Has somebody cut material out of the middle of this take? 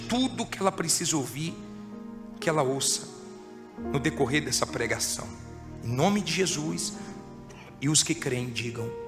no; 0 cuts

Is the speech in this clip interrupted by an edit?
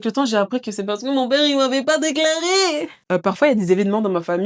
yes; 1 cut; at 3.0 s

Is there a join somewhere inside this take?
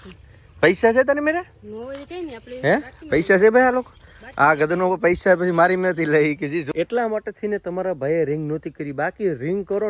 yes; 1 cut; at 6.7 s

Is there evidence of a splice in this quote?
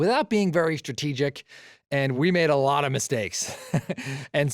yes; 1 cut; at 2.2 s

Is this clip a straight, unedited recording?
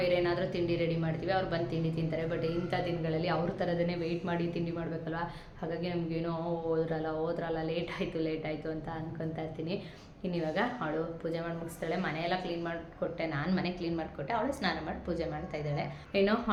yes; 0 cuts

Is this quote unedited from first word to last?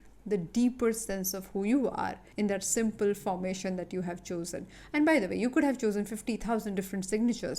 no; 1 cut; at 2.2 s

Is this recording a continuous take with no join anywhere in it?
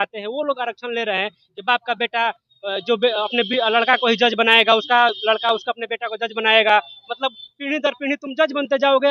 yes; 0 cuts

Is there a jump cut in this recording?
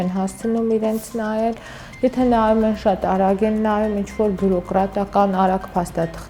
no; 0 cuts

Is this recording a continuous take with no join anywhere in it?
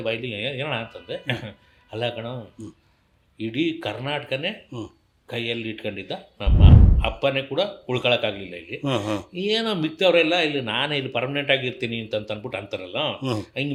yes; 0 cuts

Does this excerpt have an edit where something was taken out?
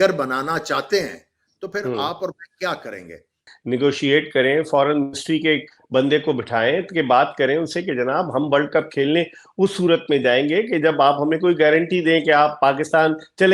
yes; 1 cut; at 3.5 s

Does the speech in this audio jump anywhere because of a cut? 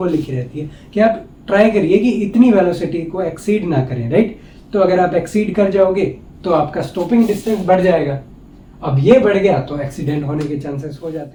no; 0 cuts

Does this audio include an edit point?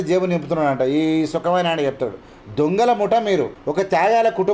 no; 0 cuts

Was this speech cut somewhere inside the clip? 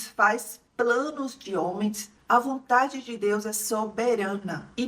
yes; 1 cut; at 2.1 s

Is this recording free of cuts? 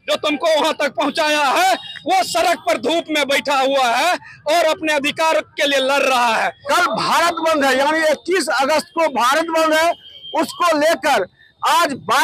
no; 1 cut; at 6.6 s

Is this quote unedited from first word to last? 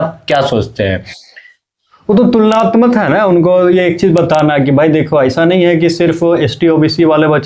yes; 0 cuts

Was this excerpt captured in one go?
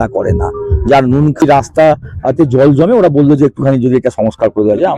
no; 1 cut; at 1.4 s

